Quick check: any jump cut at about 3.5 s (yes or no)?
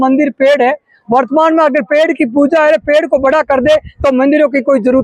no